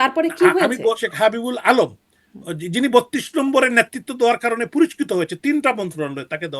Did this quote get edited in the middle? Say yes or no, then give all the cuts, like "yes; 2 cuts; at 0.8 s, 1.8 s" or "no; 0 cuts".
yes; 1 cut; at 1.1 s